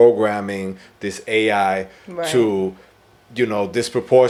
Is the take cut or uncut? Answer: uncut